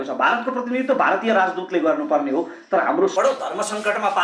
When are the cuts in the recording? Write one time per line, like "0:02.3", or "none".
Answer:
0:03.1